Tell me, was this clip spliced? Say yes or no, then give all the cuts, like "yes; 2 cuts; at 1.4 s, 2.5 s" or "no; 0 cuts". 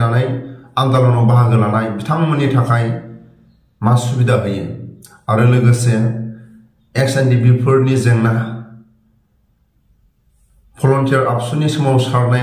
no; 0 cuts